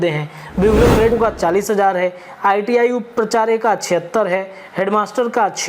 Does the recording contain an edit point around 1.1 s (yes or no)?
yes